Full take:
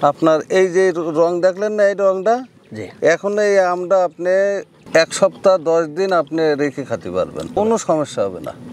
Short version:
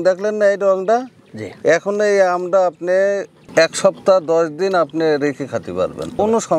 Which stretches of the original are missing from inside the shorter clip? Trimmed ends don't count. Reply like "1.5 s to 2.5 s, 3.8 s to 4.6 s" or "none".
none